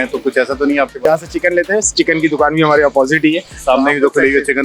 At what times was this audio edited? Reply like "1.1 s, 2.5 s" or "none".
1.0 s